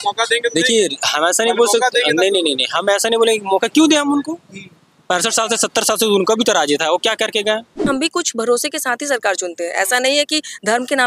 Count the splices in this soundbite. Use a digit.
1